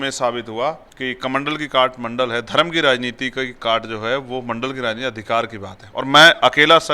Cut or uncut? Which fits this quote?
cut